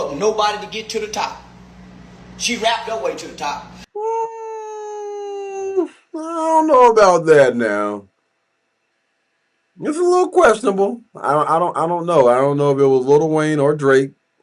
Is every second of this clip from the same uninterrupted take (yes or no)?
yes